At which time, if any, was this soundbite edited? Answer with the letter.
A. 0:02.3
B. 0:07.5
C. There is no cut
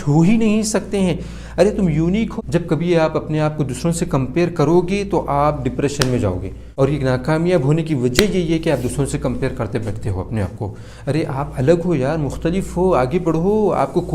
A